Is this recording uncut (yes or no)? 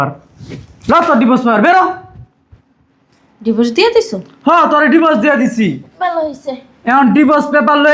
yes